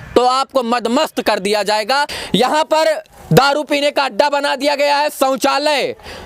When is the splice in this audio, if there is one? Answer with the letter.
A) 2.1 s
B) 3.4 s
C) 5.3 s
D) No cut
A